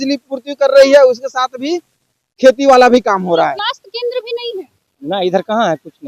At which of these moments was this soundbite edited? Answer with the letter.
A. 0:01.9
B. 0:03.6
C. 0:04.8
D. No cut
B